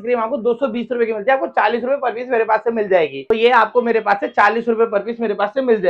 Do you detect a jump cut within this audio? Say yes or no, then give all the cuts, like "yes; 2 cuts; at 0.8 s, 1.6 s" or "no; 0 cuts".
no; 0 cuts